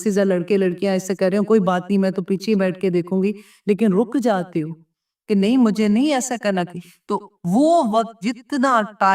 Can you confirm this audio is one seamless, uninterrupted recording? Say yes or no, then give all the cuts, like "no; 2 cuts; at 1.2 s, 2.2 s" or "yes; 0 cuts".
no; 1 cut; at 6.8 s